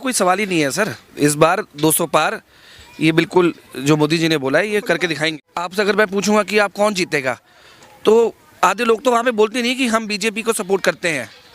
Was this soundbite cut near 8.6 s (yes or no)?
no